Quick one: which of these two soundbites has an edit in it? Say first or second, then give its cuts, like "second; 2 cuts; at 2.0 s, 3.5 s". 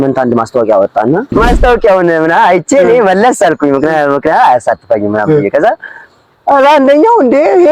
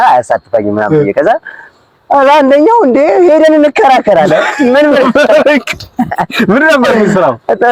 first; 1 cut; at 1.3 s